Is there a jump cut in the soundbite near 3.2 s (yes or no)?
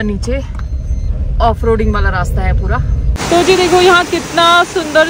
yes